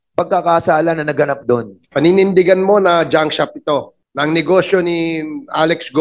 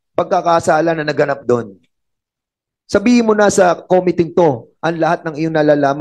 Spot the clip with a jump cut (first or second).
first